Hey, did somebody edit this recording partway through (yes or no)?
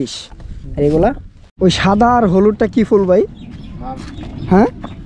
yes